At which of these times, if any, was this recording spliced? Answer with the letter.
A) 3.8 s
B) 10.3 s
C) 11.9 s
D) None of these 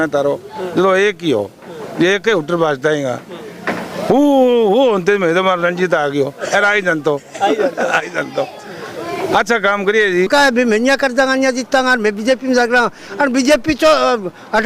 B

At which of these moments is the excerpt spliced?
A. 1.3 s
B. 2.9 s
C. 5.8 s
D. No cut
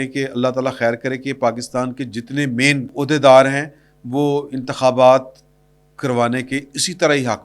B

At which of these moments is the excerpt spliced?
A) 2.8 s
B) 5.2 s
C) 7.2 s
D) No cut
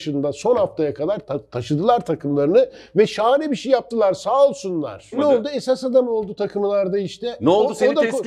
B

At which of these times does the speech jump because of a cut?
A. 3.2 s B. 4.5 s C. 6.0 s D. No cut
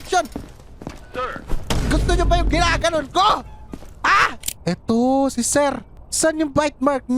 B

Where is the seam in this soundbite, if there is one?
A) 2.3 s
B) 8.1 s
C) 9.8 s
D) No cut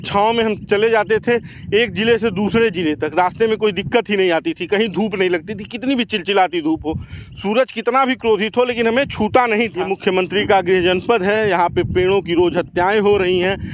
C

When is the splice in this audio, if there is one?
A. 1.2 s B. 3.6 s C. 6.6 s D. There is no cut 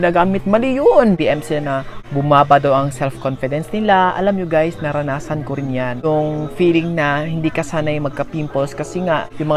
A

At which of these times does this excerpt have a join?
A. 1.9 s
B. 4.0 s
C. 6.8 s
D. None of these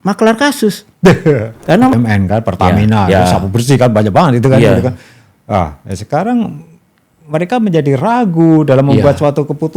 A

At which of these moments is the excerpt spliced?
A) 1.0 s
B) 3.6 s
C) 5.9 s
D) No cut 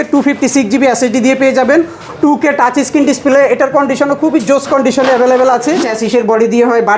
C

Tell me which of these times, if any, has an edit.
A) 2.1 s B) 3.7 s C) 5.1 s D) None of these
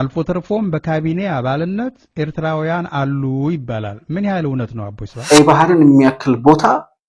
C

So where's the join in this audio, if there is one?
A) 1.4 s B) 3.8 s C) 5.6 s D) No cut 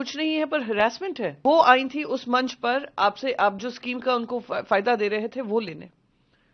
A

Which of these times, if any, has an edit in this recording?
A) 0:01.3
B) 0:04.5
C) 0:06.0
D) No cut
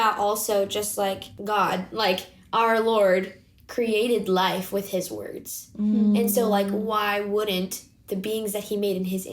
A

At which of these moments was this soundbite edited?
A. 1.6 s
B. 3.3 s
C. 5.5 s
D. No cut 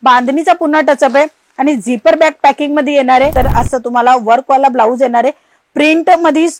B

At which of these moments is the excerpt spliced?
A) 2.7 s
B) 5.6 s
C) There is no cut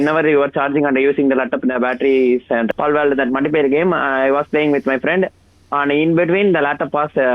A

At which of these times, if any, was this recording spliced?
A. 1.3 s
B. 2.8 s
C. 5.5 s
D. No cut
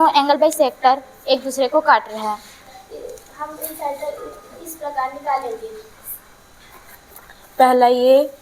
B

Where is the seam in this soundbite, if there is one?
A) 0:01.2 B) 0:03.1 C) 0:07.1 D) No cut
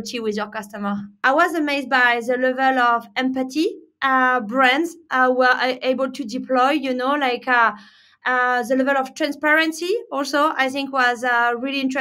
A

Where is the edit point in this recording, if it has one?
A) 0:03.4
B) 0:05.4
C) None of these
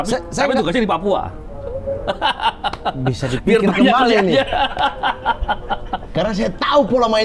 C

